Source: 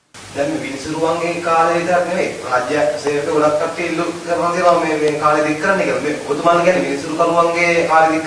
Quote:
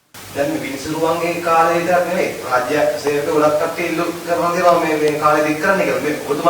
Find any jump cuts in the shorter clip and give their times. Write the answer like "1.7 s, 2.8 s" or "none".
none